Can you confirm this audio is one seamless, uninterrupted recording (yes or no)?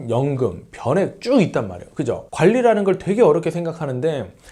no